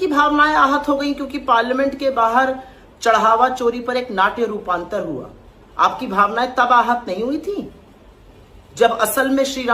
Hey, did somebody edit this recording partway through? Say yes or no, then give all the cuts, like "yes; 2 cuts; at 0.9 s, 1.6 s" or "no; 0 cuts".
no; 0 cuts